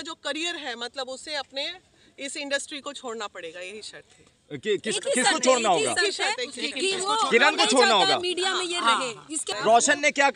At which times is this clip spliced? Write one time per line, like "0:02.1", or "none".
0:09.4

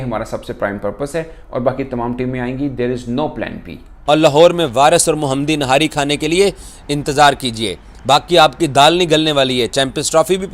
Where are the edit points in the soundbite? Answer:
0:03.9

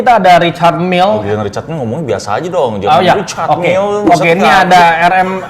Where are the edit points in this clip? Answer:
0:01.2

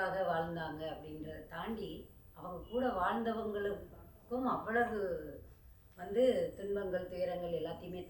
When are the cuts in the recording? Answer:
none

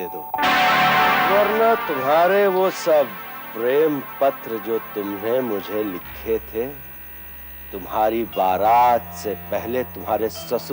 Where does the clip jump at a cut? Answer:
0:01.3

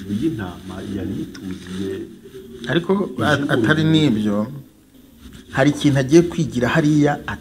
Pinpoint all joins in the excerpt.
0:04.9

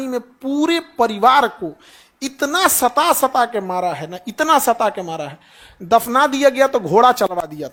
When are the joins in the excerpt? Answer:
none

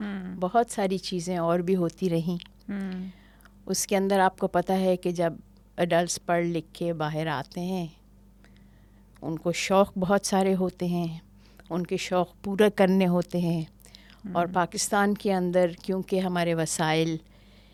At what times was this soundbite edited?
none

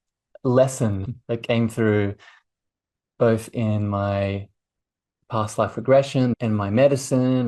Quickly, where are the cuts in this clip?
0:01.1

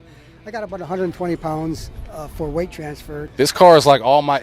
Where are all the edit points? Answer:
0:03.3

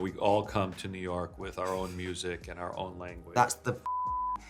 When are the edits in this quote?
0:03.3

